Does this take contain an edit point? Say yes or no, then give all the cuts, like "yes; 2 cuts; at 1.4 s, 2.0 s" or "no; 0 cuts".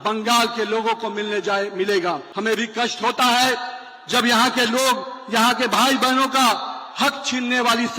yes; 1 cut; at 2.3 s